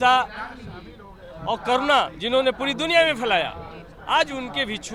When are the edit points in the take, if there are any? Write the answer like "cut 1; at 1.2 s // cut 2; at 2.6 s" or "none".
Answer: none